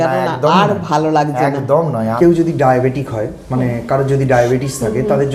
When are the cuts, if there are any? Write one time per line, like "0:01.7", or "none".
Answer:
0:02.1